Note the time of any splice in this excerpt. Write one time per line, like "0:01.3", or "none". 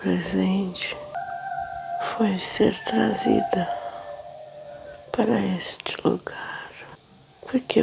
0:01.2